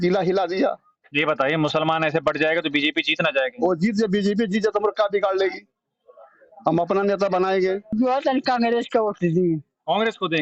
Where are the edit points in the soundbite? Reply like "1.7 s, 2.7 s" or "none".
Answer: 7.9 s